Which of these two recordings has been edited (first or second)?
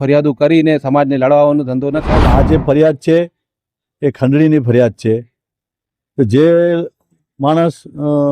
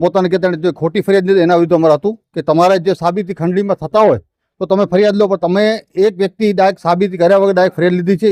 first